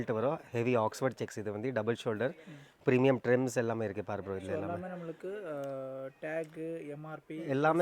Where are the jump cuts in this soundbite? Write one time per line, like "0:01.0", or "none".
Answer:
none